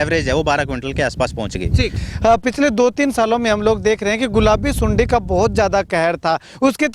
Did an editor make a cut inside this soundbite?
yes; 1 cut; at 2.0 s

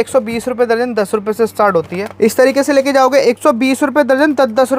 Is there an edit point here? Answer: yes; 1 cut; at 2.0 s

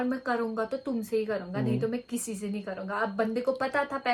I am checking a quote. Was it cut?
no; 0 cuts

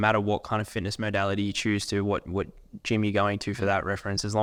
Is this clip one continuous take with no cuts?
yes; 0 cuts

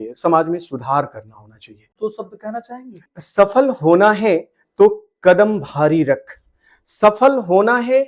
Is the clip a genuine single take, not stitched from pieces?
no; 2 cuts; at 1.9 s, 3.1 s

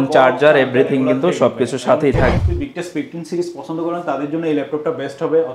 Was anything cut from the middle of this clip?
yes; 1 cut; at 2.4 s

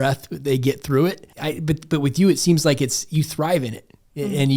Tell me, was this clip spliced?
yes; 1 cut; at 1.3 s

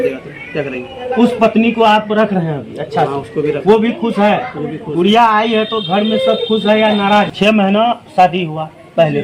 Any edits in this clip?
yes; 1 cut; at 7.3 s

